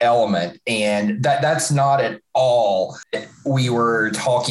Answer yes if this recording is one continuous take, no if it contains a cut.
no